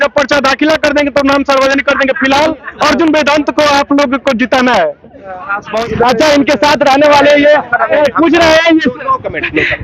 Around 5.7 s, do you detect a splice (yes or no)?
yes